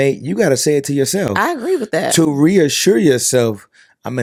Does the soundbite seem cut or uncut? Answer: uncut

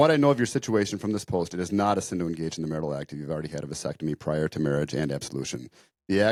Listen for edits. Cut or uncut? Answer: uncut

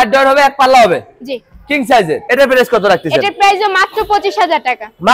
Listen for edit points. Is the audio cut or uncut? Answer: uncut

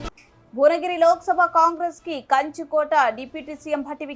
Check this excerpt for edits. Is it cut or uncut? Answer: uncut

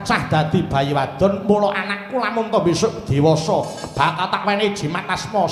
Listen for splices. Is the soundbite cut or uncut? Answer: uncut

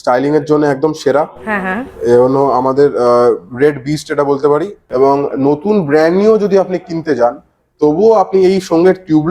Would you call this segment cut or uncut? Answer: cut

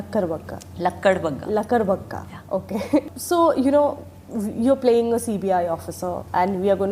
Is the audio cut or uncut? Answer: uncut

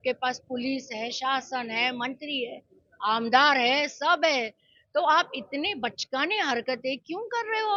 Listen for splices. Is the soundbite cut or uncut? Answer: uncut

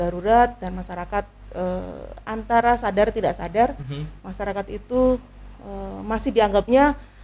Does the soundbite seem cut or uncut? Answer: uncut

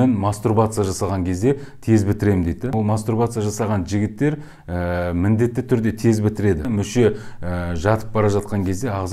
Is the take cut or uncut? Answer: cut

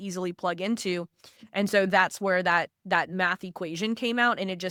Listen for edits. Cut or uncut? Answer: uncut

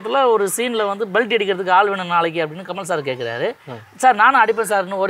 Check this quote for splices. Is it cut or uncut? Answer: uncut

